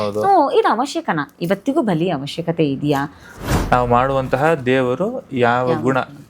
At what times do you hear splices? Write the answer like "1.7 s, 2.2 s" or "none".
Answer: 3.2 s